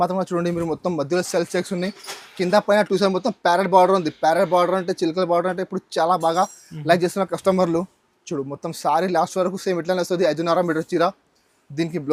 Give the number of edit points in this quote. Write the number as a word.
zero